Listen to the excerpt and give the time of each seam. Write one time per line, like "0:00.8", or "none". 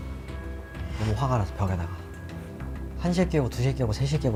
none